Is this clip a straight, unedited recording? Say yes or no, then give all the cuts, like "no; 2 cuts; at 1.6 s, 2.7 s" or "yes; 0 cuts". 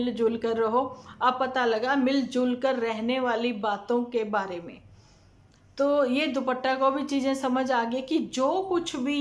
yes; 0 cuts